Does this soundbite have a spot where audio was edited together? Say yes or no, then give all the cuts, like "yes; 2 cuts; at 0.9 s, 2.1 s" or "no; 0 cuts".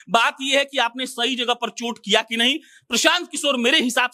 no; 0 cuts